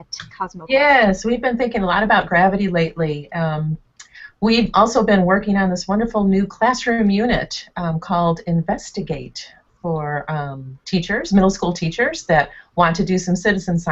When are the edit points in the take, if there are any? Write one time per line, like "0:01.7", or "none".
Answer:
0:10.7